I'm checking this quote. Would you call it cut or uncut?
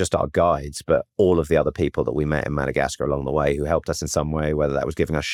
uncut